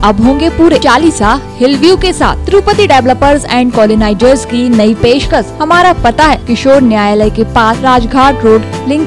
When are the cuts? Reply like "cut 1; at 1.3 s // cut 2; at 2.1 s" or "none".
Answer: cut 1; at 0.8 s // cut 2; at 5.5 s // cut 3; at 6.4 s // cut 4; at 7.8 s

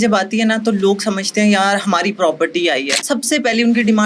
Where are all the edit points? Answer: cut 1; at 3.0 s

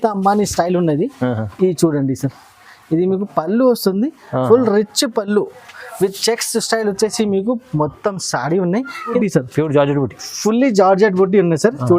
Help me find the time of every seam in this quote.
cut 1; at 9.2 s

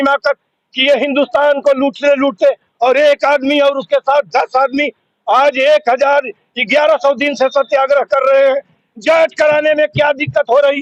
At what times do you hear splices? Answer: none

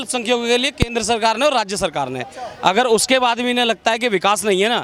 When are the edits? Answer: none

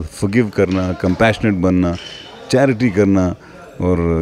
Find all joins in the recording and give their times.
none

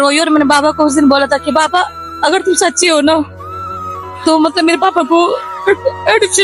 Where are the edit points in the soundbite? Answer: none

